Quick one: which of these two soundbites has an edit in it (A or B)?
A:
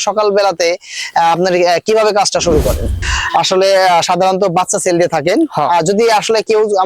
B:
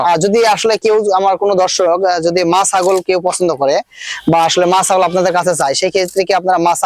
A